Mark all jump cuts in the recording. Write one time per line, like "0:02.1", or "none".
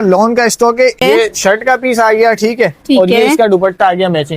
0:01.0